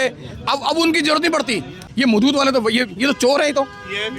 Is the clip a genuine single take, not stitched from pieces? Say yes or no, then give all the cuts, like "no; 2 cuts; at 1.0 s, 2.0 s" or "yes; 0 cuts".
no; 1 cut; at 1.8 s